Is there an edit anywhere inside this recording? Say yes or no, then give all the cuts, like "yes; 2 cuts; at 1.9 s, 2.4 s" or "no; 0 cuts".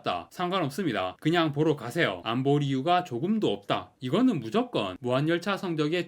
yes; 1 cut; at 3.9 s